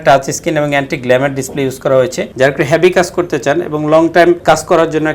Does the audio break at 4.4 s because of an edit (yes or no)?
yes